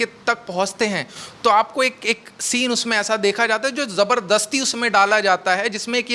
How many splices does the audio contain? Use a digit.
0